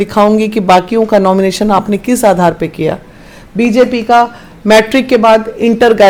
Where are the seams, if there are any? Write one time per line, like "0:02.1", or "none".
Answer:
none